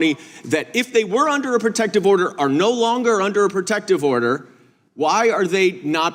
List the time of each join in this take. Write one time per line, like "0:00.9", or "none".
none